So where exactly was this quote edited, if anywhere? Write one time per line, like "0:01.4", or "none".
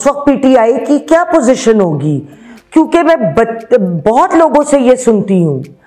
none